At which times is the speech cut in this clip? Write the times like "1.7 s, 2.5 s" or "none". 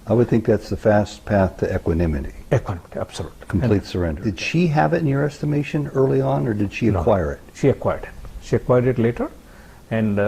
4.2 s